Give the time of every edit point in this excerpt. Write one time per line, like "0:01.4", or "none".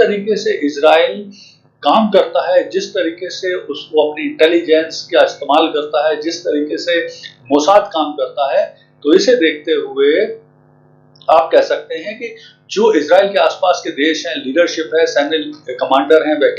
none